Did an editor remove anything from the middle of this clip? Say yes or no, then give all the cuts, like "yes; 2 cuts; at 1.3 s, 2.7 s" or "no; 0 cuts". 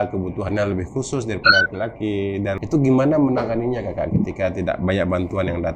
yes; 1 cut; at 2.6 s